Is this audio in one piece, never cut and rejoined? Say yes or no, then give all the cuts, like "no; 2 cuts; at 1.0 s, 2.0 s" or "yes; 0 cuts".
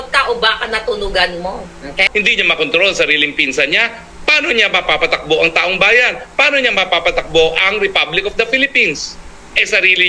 no; 1 cut; at 2.1 s